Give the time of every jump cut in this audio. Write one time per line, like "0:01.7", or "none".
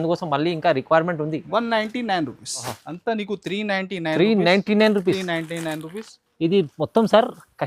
0:02.8